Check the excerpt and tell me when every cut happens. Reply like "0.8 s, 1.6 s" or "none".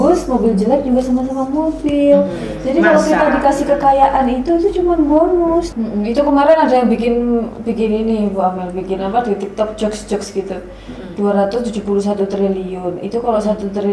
5.7 s